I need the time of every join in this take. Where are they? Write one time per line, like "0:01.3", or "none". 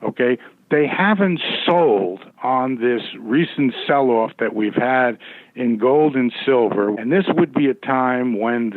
0:06.9